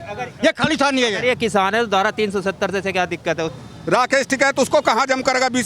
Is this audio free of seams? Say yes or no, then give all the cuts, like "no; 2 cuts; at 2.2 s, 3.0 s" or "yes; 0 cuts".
no; 1 cut; at 3.5 s